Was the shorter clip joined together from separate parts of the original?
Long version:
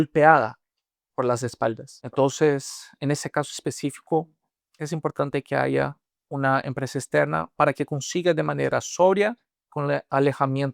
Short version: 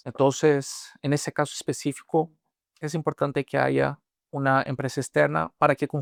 no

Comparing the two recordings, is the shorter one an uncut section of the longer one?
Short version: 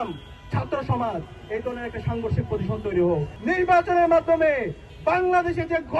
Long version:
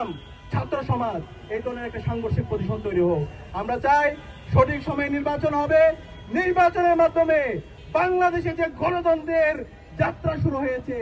no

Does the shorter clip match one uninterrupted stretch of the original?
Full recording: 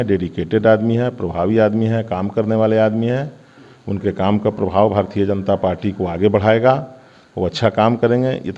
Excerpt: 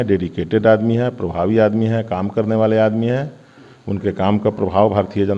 yes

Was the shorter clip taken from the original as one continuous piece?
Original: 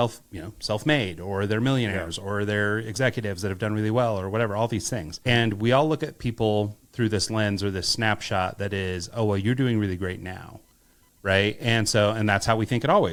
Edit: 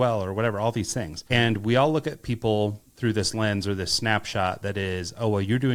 yes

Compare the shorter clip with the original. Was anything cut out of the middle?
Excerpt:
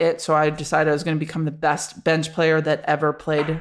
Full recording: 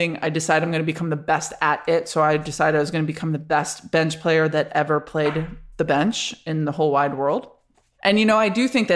no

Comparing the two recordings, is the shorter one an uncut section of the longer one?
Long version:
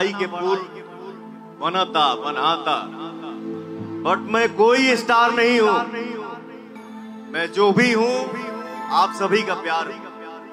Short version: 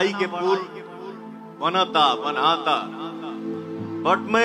yes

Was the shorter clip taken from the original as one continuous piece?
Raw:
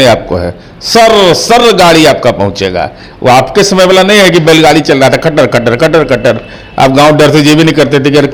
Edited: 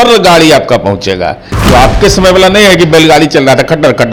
yes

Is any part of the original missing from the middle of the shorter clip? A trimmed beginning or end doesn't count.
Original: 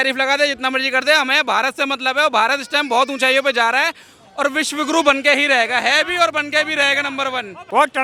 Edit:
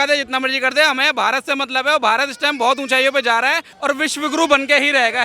yes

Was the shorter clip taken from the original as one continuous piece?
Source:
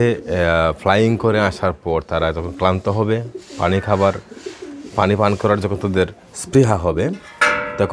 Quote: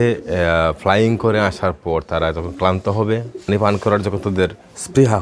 no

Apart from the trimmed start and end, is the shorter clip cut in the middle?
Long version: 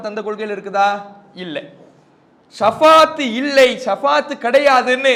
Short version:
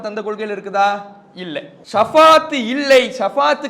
yes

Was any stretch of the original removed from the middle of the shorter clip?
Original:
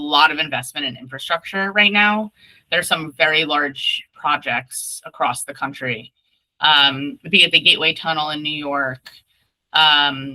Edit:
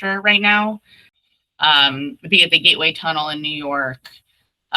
yes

